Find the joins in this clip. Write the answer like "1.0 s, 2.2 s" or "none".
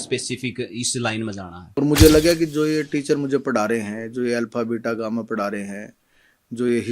1.6 s